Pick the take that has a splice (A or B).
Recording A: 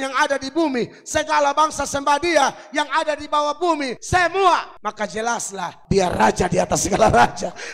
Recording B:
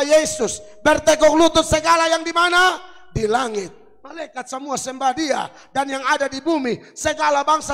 A